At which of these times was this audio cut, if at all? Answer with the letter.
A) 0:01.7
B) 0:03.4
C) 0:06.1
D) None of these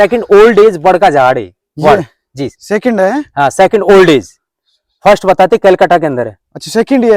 D